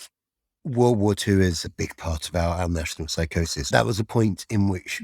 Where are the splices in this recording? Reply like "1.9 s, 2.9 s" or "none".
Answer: 1.6 s, 3.7 s